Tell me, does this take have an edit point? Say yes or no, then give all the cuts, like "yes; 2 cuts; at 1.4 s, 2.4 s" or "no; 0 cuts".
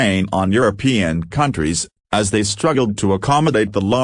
yes; 1 cut; at 1.7 s